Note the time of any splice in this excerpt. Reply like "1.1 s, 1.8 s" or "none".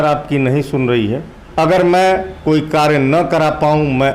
1.4 s